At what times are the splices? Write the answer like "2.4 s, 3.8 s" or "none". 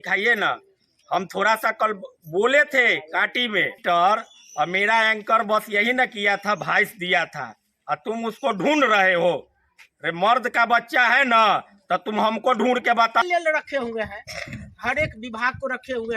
3.8 s, 13.2 s